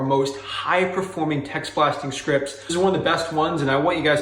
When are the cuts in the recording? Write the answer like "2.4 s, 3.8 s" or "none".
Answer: 2.7 s

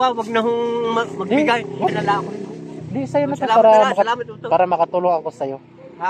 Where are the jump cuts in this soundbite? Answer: 1.9 s

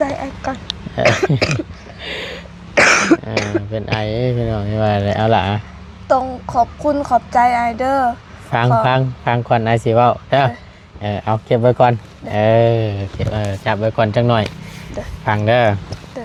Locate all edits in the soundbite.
none

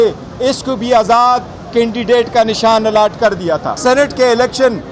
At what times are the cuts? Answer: 3.7 s

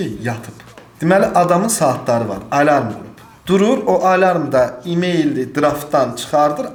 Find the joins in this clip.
none

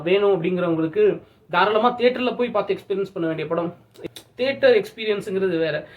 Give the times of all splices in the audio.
4.0 s

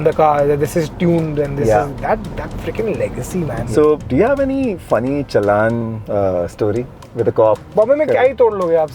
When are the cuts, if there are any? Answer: 3.7 s, 6.0 s, 7.6 s

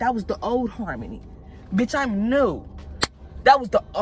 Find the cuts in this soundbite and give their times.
none

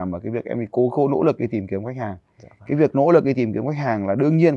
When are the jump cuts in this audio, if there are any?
none

